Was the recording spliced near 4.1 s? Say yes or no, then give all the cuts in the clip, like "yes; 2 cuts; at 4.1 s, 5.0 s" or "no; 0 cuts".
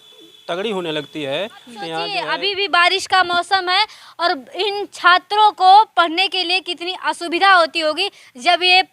no; 1 cut; at 2.1 s